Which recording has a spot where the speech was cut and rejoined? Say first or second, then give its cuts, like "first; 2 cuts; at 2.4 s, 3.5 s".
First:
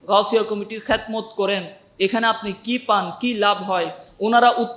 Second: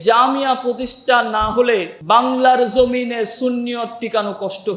second; 1 cut; at 1.9 s